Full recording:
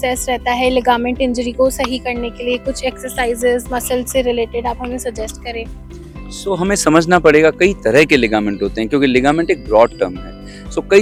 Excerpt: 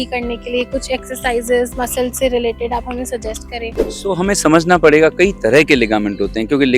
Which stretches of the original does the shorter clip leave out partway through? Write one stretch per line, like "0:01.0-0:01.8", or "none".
0:05.8-0:06.3